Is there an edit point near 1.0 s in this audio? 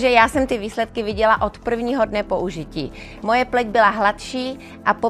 no; 0 cuts

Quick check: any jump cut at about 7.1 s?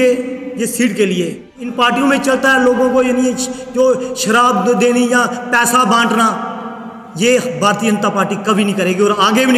no; 1 cut; at 1.7 s

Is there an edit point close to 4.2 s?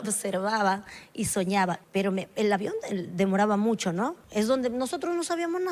yes; 2 cuts; at 1.8 s, 4.2 s

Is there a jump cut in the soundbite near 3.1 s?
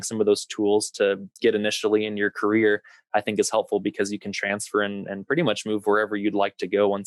no; 1 cut; at 1.3 s

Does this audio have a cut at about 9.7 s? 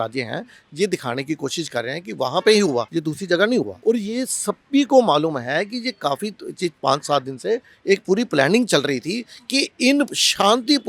no; 2 cuts; at 2.9 s, 3.7 s

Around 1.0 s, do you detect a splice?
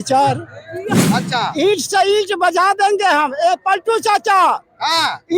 yes; 1 cut; at 1.0 s

